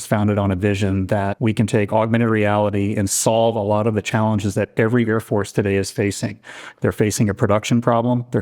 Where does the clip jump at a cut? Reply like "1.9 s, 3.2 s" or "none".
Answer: 1.3 s